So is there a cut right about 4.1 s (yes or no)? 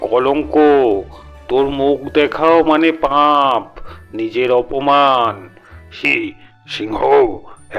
no